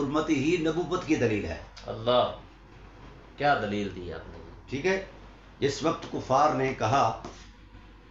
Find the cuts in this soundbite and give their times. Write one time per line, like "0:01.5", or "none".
none